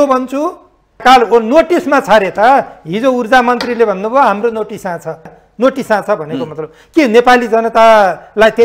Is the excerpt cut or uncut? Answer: cut